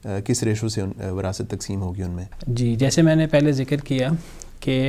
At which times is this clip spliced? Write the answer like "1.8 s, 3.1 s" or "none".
none